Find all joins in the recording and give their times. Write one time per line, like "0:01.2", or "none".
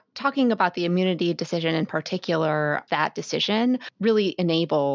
0:02.8